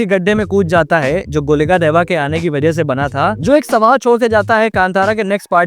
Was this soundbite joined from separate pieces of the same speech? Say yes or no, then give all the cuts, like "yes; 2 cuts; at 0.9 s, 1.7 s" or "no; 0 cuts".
yes; 1 cut; at 3.4 s